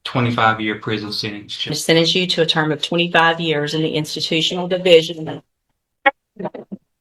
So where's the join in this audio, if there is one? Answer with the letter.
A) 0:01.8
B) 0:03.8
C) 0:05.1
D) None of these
A